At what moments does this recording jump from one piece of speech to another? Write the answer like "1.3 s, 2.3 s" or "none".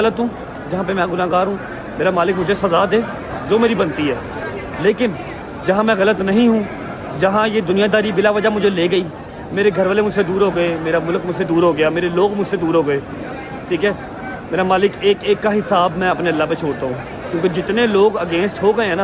none